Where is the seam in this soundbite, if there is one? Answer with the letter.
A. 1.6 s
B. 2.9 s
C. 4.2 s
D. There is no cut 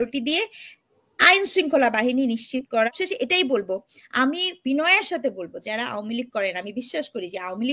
B